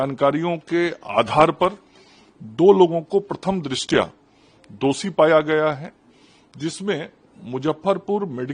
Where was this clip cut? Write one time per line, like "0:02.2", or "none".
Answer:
none